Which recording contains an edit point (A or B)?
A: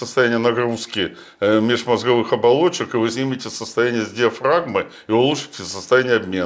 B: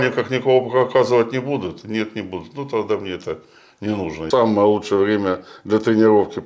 B